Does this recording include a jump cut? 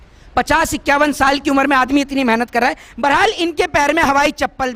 no; 0 cuts

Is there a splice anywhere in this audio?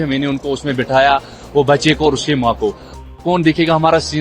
yes; 1 cut; at 3.0 s

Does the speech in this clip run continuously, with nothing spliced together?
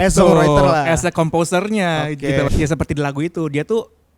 no; 1 cut; at 2.5 s

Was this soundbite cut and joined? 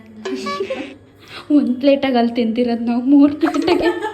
no; 0 cuts

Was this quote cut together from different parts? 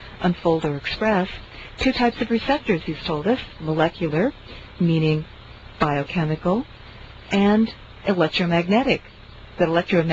no; 0 cuts

